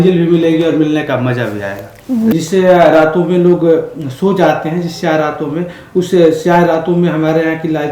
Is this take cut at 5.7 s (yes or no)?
no